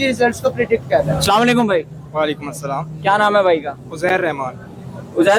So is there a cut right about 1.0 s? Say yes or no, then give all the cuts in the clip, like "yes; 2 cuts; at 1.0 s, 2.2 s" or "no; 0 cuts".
no; 0 cuts